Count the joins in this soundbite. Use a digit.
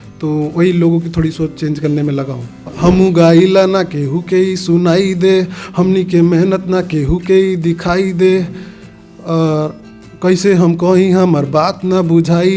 1